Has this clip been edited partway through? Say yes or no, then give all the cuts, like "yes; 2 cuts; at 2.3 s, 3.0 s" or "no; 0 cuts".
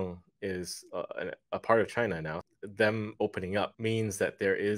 yes; 2 cuts; at 2.3 s, 3.7 s